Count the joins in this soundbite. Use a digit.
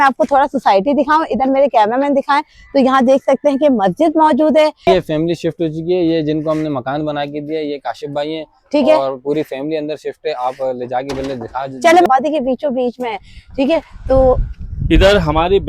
2